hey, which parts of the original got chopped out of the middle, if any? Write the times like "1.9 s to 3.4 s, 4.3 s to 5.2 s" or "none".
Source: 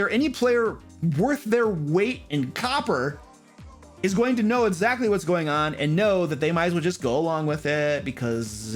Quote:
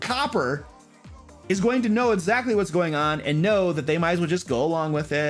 none